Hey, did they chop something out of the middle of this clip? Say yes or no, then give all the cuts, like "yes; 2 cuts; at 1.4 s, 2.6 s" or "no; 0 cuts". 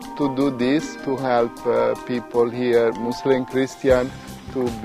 yes; 1 cut; at 1.0 s